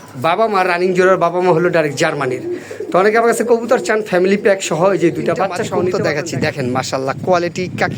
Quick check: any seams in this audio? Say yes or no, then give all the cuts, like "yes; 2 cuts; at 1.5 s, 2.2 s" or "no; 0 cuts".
yes; 1 cut; at 5.9 s